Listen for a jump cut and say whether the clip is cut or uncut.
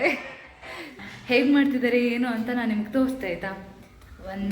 cut